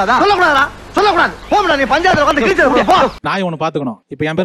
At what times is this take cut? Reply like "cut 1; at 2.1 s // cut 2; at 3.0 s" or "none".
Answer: cut 1; at 3.2 s